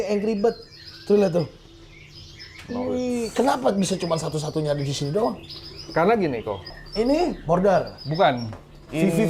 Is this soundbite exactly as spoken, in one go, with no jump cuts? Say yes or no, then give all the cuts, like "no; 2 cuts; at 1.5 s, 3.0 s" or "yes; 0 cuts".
no; 1 cut; at 6.8 s